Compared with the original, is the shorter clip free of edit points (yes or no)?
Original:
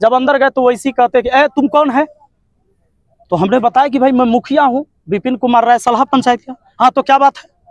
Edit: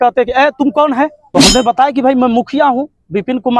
no